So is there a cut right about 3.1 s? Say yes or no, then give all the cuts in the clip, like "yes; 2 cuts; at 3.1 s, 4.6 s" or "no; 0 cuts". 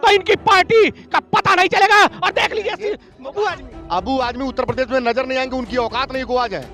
yes; 1 cut; at 3.1 s